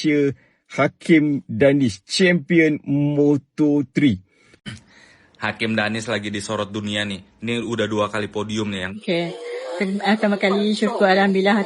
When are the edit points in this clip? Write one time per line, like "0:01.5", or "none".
0:04.5
0:08.9